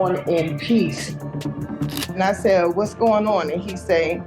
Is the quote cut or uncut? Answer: cut